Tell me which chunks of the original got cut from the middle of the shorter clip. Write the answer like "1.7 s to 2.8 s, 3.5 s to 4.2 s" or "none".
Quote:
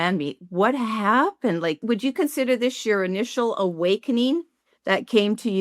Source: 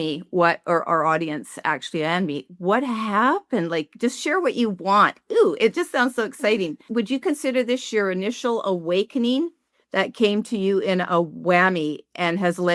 3.9 s to 6.9 s